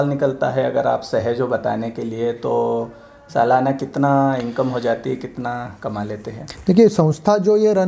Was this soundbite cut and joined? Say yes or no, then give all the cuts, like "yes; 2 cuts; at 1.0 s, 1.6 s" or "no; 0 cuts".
no; 0 cuts